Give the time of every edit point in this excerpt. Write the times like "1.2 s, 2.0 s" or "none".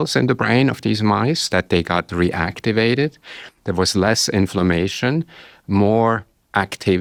none